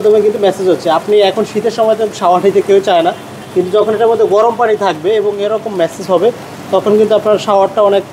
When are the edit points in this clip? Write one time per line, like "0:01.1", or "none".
none